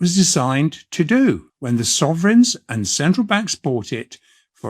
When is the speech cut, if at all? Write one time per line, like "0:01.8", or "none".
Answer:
0:01.5